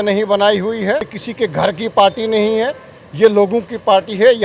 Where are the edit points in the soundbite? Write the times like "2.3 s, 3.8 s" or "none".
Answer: 1.2 s